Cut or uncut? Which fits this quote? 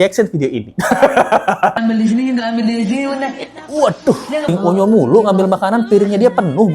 cut